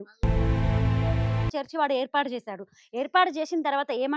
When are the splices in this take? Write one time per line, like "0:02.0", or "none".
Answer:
0:01.5